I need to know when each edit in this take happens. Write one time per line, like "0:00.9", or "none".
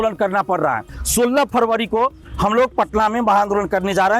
0:00.9

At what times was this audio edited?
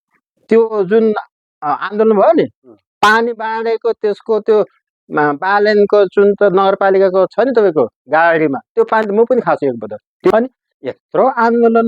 0:10.3

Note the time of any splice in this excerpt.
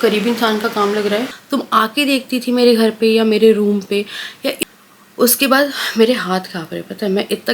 0:01.4
0:04.6

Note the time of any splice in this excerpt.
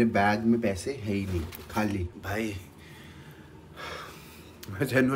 none

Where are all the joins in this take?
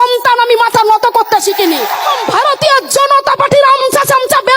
0:02.2

